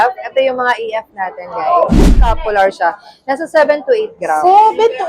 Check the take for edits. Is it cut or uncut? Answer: cut